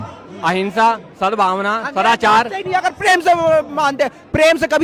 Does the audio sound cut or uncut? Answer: uncut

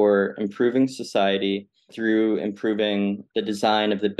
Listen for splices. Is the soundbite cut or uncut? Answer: cut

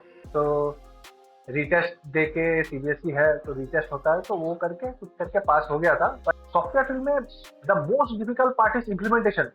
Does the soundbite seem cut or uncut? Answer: cut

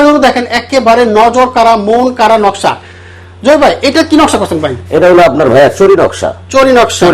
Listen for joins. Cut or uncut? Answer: uncut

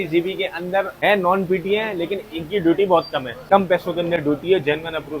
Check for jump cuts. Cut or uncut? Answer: cut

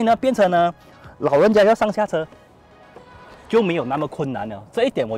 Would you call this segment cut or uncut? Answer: uncut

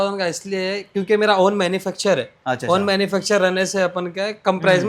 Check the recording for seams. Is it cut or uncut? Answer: uncut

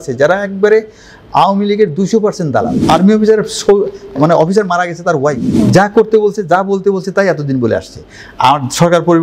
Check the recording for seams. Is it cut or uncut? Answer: cut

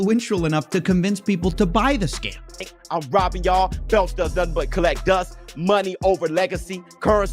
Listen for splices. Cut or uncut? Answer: cut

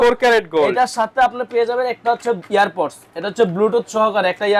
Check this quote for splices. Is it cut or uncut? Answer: uncut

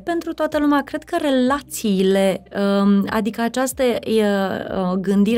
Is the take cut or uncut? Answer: uncut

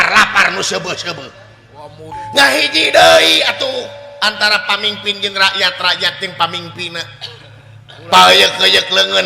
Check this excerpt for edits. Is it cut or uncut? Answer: cut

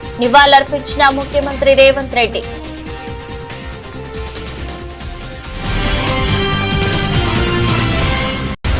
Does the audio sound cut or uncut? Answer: cut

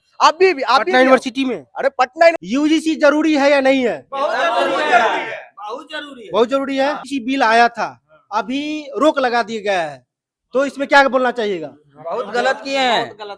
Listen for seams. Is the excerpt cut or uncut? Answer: cut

